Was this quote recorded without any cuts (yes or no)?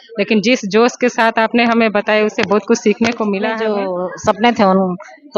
no